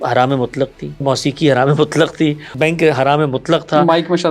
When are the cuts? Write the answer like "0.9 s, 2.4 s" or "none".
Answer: 1.0 s, 2.5 s